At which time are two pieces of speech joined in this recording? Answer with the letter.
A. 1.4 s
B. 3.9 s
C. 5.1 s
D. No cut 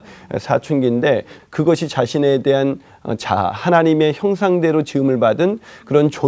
A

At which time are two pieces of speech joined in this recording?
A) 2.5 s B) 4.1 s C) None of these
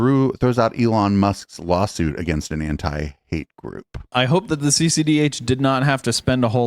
B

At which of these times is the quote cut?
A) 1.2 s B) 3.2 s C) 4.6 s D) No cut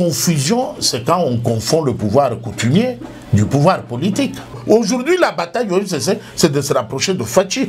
C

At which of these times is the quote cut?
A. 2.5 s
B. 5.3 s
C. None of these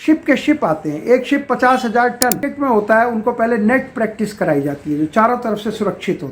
A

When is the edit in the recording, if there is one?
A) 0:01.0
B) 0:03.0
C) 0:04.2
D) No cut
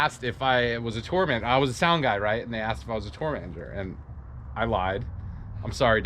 D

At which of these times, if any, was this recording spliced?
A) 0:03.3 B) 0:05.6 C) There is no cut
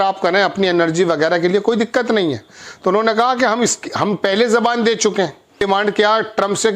B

